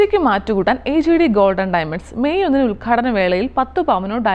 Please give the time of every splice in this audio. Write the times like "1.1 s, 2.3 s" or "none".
none